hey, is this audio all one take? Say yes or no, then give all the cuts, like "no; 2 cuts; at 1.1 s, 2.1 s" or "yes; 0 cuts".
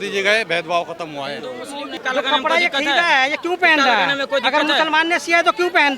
no; 1 cut; at 1.9 s